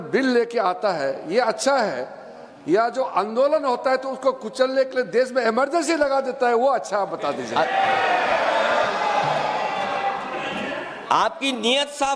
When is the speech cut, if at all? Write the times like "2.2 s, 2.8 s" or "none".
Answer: 10.5 s